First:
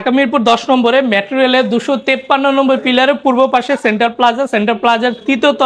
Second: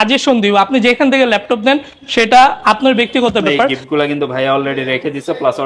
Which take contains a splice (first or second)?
second